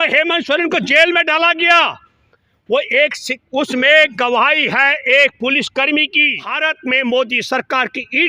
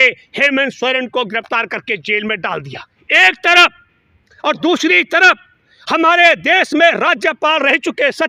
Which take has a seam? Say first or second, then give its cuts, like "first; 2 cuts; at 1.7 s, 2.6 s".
first; 1 cut; at 6.5 s